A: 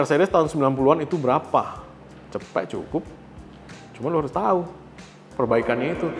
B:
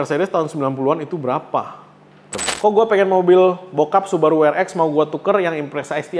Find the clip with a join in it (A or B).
B